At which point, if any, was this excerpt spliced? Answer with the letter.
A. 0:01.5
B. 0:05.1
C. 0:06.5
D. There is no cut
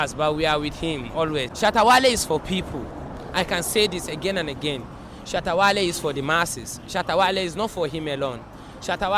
A